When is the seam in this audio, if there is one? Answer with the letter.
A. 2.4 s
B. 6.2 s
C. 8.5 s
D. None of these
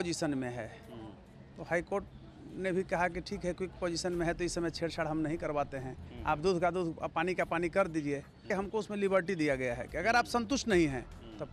C